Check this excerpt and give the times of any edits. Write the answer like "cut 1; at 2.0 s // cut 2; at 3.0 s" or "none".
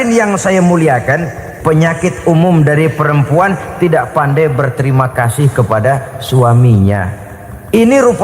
cut 1; at 1.4 s